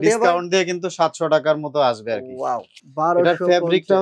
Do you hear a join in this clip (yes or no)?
yes